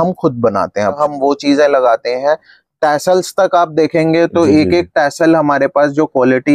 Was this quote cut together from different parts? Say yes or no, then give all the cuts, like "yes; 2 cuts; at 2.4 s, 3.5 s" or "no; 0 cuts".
yes; 1 cut; at 1.0 s